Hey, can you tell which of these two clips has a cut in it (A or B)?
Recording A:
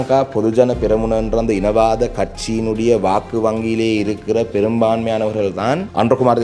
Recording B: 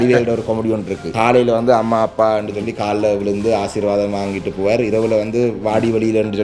B